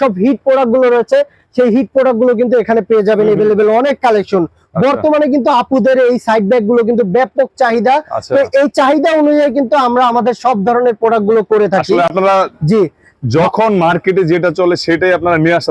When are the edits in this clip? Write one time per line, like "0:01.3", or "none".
none